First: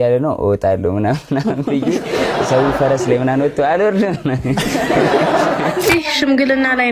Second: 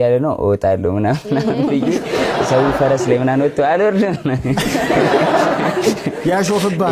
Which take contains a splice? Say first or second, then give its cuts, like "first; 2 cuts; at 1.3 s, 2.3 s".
first; 1 cut; at 5.9 s